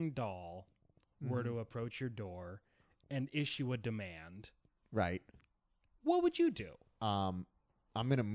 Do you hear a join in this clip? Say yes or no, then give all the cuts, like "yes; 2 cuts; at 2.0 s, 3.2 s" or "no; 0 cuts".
yes; 1 cut; at 6.8 s